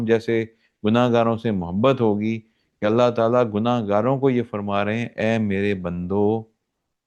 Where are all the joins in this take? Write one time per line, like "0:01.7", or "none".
none